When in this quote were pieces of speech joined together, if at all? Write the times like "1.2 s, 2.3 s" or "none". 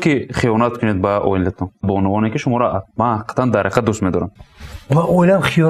1.9 s, 4.4 s